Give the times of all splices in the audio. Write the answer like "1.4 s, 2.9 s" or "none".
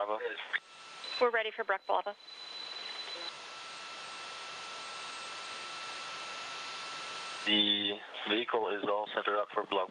none